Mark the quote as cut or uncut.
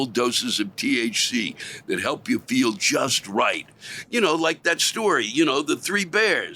uncut